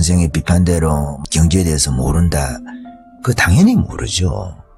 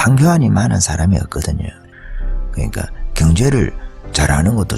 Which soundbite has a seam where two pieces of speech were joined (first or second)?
second